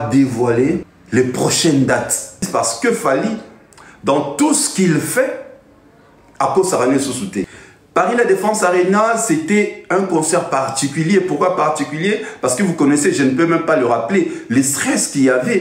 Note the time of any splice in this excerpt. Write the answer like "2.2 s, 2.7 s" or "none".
0.9 s, 2.5 s, 7.5 s